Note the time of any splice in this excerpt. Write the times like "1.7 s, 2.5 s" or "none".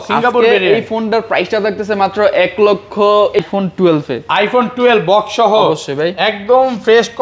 3.4 s